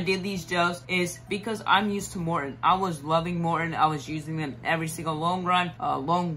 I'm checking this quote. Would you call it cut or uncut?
uncut